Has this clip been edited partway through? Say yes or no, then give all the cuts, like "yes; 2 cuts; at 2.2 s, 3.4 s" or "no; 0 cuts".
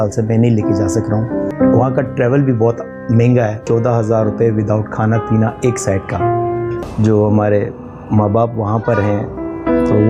yes; 3 cuts; at 1.5 s, 3.6 s, 6.9 s